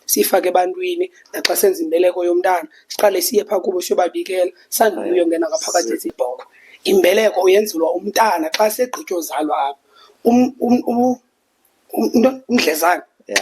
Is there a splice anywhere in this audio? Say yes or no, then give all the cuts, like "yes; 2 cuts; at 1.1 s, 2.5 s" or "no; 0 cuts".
yes; 1 cut; at 6.1 s